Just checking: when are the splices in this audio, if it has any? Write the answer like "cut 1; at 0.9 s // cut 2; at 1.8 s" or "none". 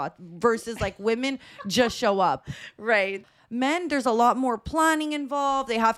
cut 1; at 3.2 s

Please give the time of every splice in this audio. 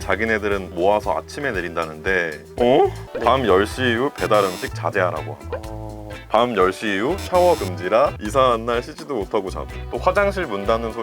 cut 1; at 3.1 s // cut 2; at 8.2 s

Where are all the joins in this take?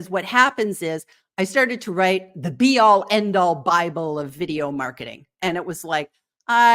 none

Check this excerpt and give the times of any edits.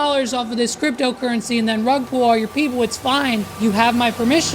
cut 1; at 3.5 s

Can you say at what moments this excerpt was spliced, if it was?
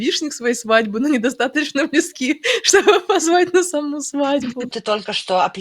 cut 1; at 4.6 s

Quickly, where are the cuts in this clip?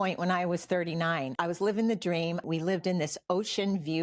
cut 1; at 1.3 s // cut 2; at 2.4 s

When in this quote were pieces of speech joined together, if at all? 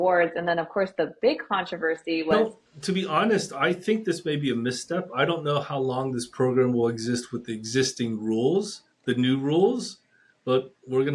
cut 1; at 2.3 s

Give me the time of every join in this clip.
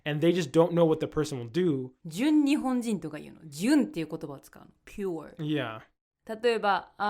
cut 1; at 2.0 s

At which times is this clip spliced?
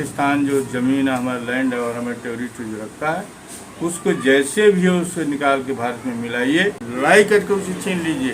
cut 1; at 6.9 s

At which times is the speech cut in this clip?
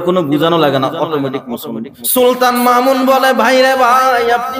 cut 1; at 1.9 s

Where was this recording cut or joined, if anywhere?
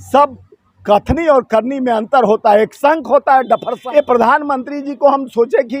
cut 1; at 3.8 s

